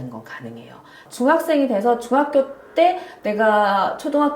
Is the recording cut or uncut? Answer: cut